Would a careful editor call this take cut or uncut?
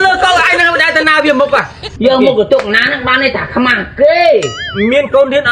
cut